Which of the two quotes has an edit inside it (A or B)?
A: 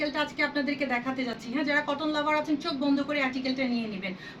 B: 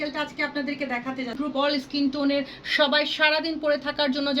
B